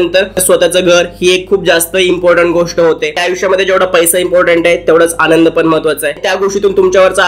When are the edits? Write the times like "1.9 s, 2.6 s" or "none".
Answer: 3.2 s, 6.2 s